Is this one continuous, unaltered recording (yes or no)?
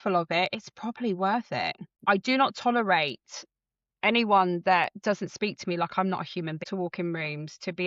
no